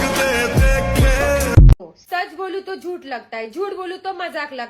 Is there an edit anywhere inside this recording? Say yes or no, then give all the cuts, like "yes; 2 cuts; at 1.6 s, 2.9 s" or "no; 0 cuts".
yes; 1 cut; at 1.8 s